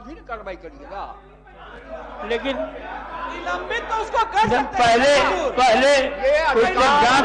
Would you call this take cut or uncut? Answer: uncut